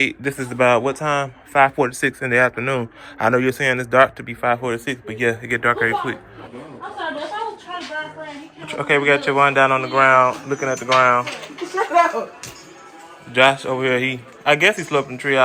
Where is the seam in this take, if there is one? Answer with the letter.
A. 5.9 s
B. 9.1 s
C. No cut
A